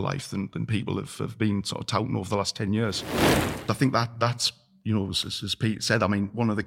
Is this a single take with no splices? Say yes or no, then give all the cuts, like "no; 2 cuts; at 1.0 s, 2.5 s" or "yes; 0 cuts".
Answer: no; 2 cuts; at 3.0 s, 3.6 s